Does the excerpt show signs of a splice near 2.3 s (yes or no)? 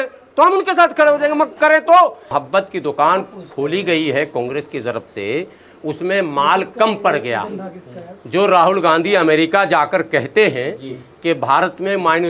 yes